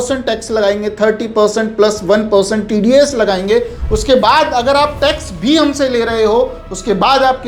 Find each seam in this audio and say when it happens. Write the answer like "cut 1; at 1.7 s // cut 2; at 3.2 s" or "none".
none